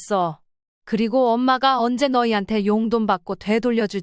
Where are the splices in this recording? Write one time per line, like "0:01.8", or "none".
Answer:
none